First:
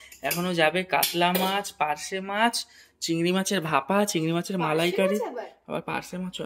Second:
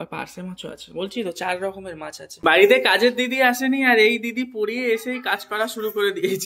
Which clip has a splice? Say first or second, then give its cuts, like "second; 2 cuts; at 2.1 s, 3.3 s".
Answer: second; 1 cut; at 2.3 s